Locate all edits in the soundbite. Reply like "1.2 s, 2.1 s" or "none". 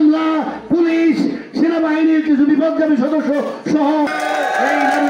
4.1 s